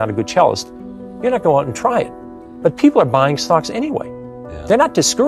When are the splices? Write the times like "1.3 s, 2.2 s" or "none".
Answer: none

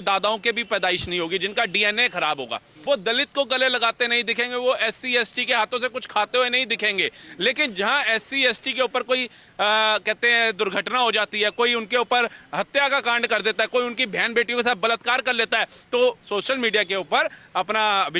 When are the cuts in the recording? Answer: 2.7 s

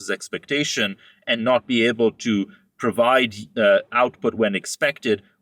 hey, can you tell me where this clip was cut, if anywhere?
none

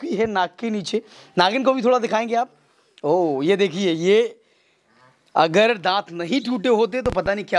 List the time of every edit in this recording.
none

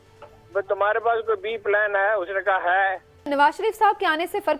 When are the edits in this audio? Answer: 3.3 s

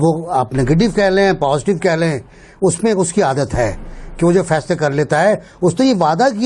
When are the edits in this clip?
none

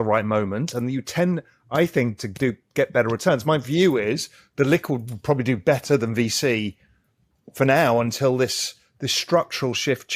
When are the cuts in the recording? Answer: none

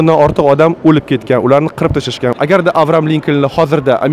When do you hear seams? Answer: 2.3 s

